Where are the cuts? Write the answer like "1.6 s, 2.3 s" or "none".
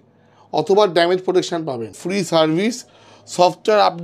2.0 s